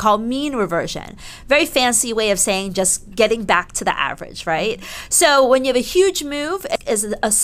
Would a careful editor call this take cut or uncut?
uncut